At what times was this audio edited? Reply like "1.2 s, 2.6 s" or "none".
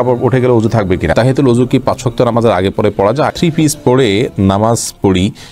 1.1 s, 3.3 s